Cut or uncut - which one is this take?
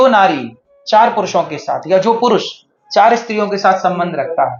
uncut